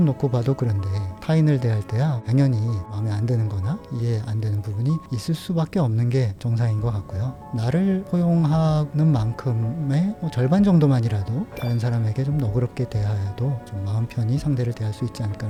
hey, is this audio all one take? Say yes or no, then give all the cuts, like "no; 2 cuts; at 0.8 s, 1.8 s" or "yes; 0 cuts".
yes; 0 cuts